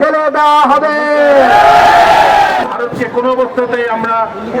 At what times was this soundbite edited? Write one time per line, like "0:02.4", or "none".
0:02.6